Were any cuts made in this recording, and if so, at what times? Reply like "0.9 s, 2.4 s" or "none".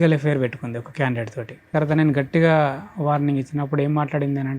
1.7 s